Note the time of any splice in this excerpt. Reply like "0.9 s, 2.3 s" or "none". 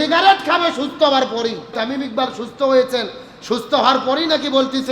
1.8 s